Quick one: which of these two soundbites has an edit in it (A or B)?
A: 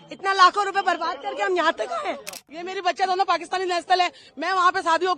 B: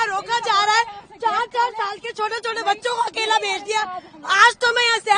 A